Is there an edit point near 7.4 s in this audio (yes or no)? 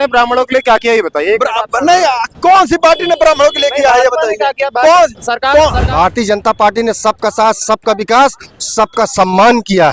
no